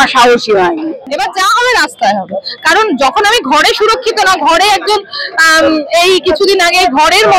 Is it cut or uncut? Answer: cut